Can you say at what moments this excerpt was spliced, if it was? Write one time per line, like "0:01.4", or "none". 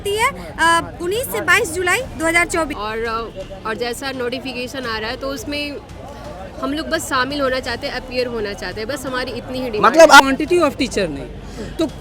0:02.7
0:10.2